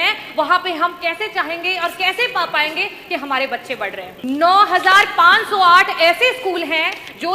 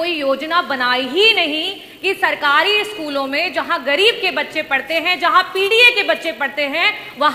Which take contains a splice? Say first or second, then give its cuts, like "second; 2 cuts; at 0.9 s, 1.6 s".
first; 1 cut; at 4.1 s